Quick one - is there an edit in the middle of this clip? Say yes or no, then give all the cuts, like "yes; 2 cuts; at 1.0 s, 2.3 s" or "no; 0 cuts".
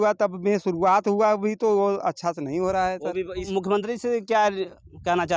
yes; 1 cut; at 3.5 s